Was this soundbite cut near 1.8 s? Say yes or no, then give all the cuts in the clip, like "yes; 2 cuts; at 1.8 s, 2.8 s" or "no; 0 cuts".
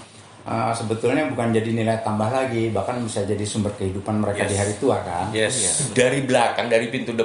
no; 1 cut; at 5.9 s